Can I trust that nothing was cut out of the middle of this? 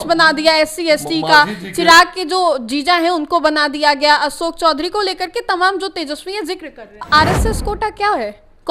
no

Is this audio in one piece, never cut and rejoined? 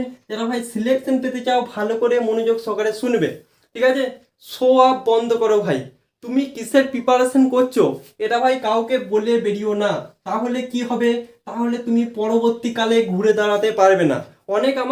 yes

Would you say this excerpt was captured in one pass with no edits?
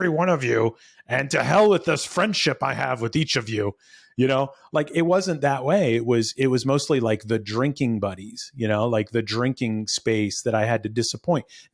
yes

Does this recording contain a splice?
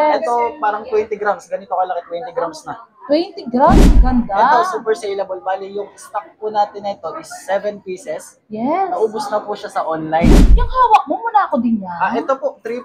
yes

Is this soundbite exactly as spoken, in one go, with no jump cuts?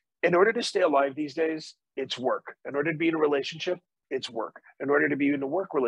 yes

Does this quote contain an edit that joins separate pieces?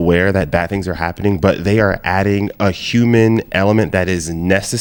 no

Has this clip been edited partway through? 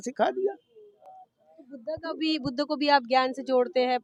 no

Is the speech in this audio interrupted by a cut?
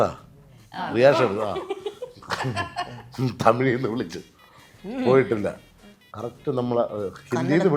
no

